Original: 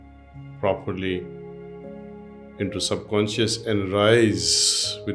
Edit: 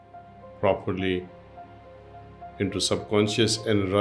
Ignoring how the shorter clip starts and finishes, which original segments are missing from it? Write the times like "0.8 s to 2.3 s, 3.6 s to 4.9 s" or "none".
none